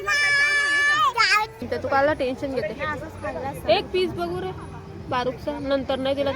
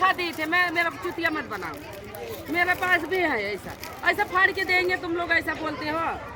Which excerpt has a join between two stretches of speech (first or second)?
first